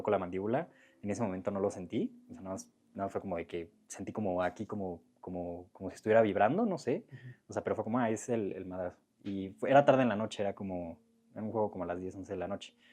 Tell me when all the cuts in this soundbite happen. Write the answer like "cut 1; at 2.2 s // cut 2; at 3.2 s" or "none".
none